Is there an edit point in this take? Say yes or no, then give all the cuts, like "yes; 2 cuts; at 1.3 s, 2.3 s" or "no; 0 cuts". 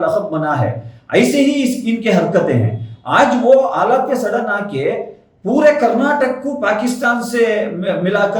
no; 0 cuts